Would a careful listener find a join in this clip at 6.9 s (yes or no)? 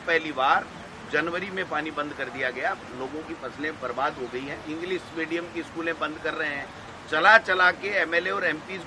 no